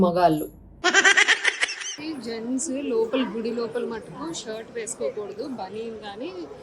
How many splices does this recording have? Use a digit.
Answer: 1